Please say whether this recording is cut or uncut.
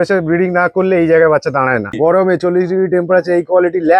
cut